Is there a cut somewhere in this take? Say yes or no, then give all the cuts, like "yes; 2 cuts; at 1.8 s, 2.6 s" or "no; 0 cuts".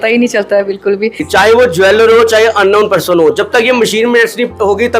yes; 1 cut; at 1.2 s